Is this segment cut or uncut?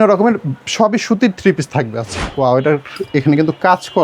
cut